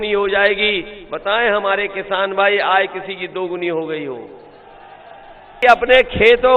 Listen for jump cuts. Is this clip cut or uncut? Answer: cut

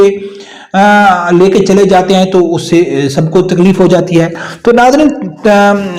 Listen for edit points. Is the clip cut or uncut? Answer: uncut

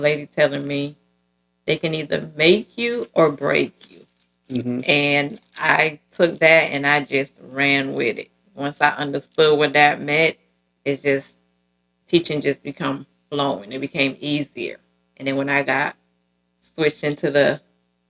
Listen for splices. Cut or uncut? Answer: uncut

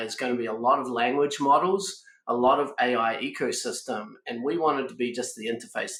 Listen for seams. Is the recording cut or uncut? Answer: uncut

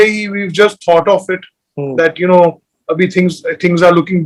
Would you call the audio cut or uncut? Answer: uncut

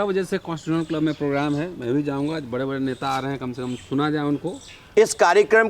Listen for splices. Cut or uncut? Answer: cut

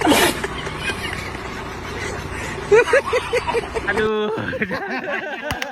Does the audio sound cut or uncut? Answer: uncut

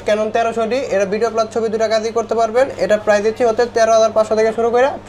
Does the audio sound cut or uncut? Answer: uncut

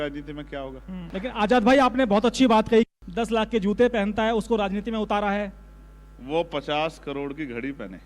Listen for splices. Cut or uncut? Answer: cut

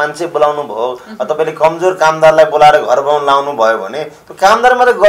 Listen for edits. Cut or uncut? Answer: uncut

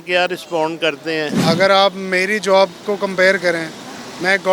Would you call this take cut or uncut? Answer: cut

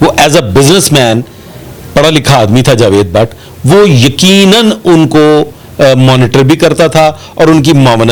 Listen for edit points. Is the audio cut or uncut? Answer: uncut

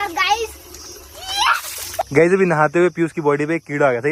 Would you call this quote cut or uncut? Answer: cut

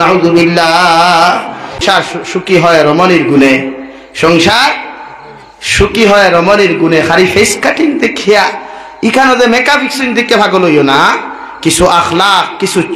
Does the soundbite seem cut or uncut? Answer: cut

